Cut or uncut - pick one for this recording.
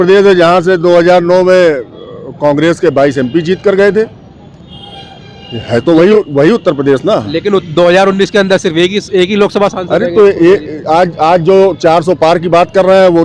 uncut